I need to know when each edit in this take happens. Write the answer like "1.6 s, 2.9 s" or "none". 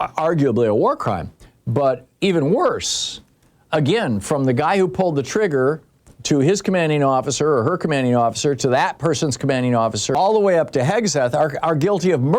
10.1 s